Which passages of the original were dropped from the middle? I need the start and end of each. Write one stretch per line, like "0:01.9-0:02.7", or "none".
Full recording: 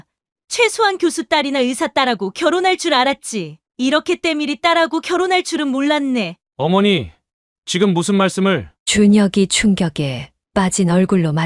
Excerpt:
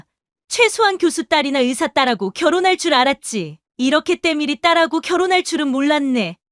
none